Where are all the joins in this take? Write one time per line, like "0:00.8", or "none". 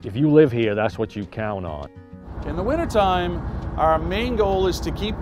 0:02.1